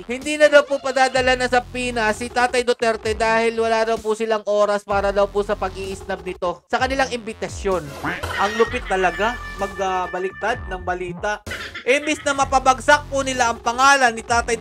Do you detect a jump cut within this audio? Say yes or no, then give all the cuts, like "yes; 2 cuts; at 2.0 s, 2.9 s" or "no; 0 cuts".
yes; 2 cuts; at 8.3 s, 11.4 s